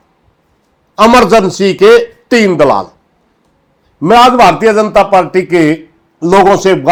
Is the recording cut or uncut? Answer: uncut